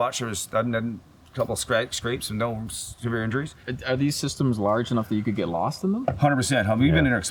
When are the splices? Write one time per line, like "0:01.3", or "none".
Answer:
0:03.7

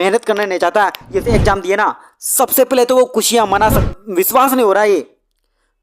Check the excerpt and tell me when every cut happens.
0:01.3
0:03.8

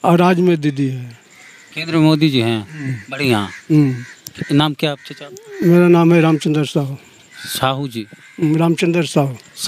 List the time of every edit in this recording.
none

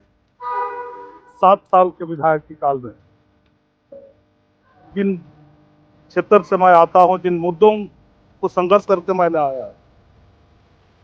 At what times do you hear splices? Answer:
none

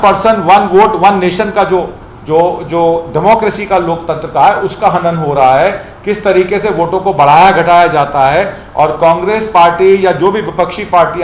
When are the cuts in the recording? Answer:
none

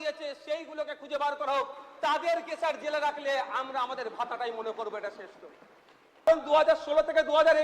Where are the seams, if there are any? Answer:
0:06.3

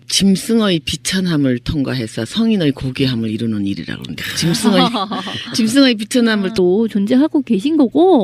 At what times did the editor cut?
none

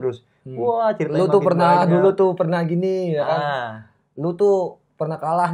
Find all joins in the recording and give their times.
none

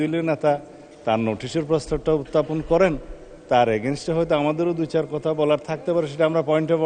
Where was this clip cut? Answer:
none

